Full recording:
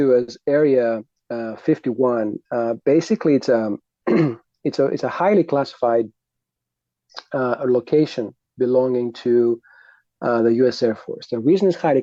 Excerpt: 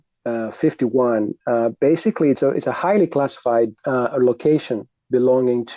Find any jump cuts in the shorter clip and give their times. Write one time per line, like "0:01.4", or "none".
0:02.4
0:03.8

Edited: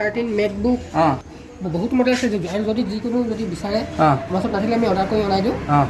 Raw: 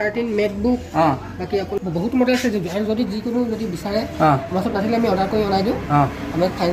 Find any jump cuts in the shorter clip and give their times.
0:01.5

